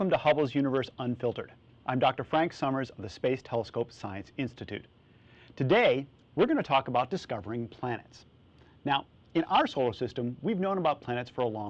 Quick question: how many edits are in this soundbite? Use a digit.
1